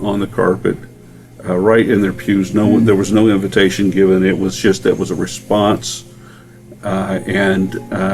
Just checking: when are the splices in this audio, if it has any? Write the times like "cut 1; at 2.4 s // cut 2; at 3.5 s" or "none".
none